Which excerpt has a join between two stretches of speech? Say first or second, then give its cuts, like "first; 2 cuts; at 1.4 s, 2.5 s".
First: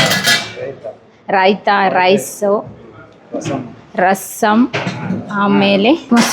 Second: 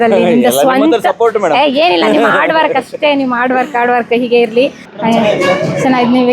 second; 1 cut; at 4.8 s